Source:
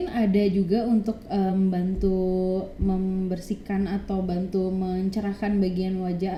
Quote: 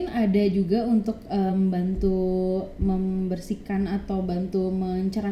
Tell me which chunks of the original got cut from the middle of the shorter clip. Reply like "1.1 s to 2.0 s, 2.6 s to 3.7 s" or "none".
none